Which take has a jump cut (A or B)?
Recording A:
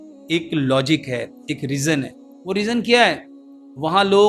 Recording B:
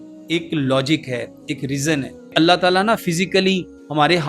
B